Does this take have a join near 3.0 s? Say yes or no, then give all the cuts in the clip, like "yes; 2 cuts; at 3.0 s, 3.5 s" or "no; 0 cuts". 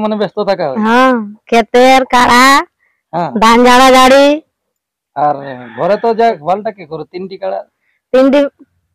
no; 1 cut; at 6.4 s